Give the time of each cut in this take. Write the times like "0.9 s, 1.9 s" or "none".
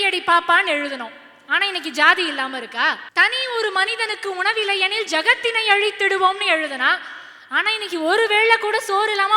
3.0 s